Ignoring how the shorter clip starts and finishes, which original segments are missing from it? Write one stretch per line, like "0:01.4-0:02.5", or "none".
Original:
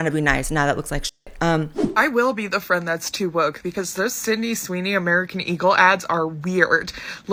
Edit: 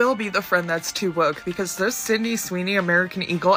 none